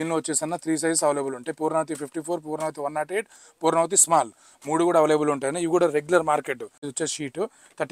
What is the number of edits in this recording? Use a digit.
1